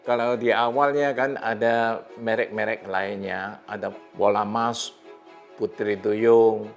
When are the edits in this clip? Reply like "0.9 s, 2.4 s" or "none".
4.0 s